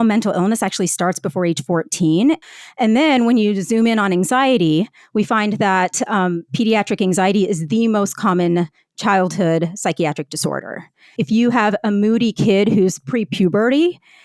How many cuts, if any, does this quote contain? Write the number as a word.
two